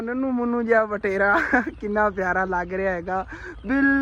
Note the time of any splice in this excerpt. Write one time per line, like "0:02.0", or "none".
none